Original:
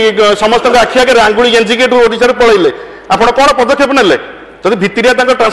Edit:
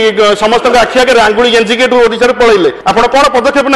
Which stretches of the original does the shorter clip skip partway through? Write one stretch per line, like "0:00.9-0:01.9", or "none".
0:02.8-0:03.0